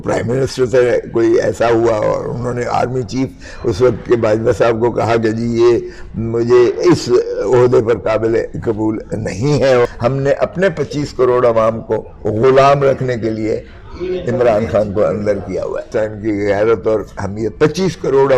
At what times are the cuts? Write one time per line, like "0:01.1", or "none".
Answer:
0:09.9
0:15.9